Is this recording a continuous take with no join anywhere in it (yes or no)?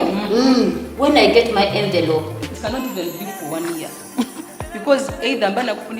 no